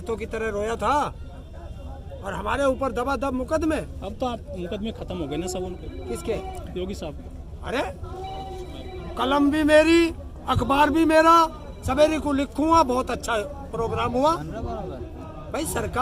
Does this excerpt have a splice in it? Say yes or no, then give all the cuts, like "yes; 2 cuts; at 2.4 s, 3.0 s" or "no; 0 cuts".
no; 0 cuts